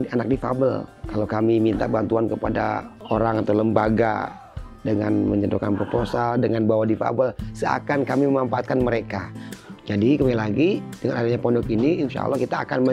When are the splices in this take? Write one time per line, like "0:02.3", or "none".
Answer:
0:01.0
0:02.9
0:09.4